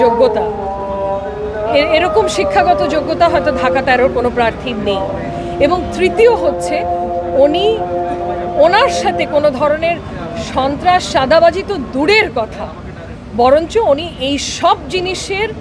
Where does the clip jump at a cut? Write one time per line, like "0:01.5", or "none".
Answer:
none